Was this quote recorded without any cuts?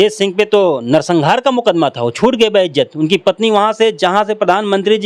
yes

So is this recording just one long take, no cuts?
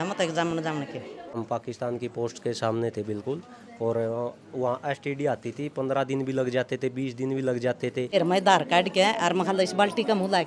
no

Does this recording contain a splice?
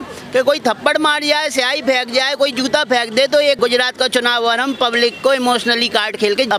no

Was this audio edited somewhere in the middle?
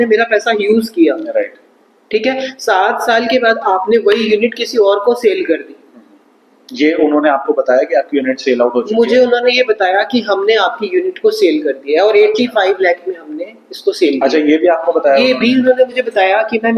no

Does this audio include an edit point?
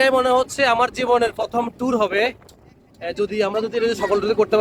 no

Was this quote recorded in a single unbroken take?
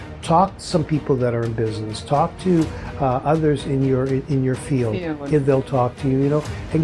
yes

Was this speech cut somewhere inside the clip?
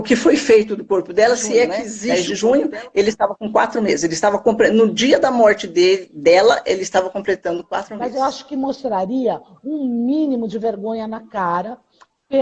yes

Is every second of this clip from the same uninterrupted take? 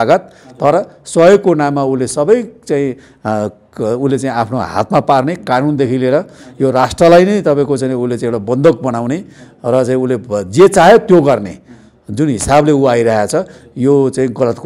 yes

